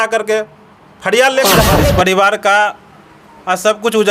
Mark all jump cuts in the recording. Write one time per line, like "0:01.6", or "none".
0:01.7